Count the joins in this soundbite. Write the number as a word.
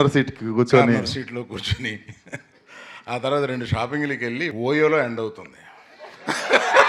one